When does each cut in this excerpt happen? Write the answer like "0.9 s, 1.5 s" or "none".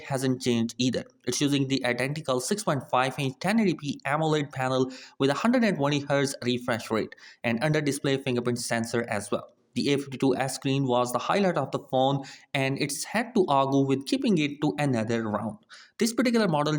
none